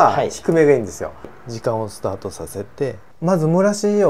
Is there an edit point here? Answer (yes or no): yes